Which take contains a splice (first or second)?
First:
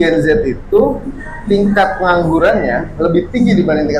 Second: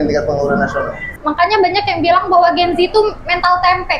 second